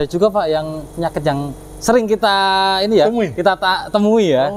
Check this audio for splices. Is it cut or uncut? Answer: uncut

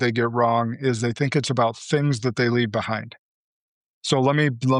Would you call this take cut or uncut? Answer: uncut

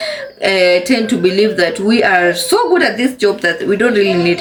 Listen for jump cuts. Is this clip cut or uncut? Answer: uncut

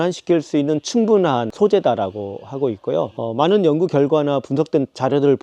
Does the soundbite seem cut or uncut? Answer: cut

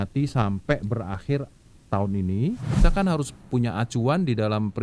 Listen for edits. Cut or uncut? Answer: cut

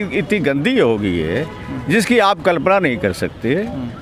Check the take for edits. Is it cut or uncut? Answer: uncut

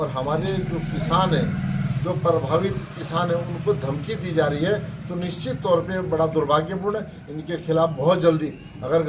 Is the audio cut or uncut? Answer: uncut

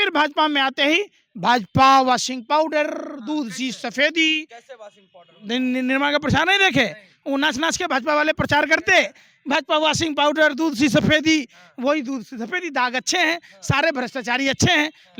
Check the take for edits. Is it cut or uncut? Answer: uncut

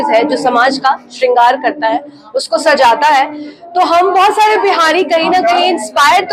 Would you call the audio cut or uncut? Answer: uncut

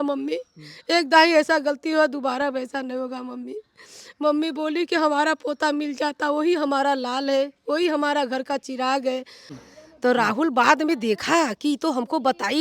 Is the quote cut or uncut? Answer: cut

